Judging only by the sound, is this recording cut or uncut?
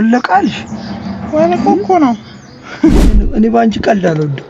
cut